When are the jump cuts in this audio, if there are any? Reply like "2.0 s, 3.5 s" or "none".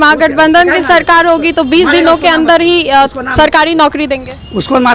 none